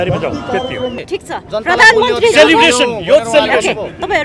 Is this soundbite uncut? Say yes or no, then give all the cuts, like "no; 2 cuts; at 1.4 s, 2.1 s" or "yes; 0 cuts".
no; 1 cut; at 1.0 s